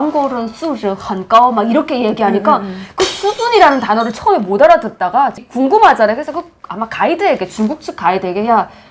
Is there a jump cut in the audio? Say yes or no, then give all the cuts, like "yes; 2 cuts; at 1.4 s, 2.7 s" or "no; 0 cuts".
no; 0 cuts